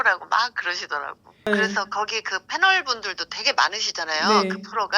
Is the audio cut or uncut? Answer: cut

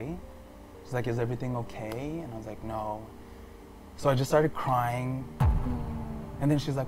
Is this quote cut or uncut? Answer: uncut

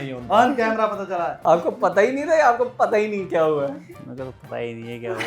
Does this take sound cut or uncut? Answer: cut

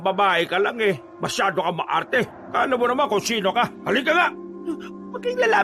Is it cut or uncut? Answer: cut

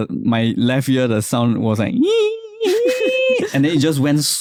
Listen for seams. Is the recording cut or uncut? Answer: uncut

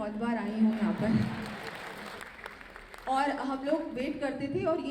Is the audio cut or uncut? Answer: cut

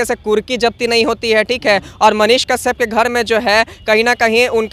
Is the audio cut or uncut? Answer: uncut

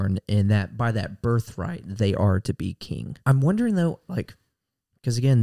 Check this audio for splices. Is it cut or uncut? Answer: cut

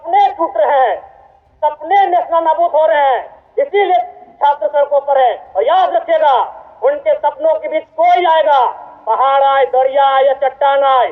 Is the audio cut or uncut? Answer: uncut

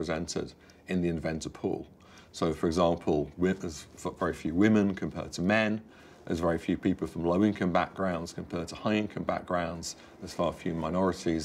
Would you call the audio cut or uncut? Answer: uncut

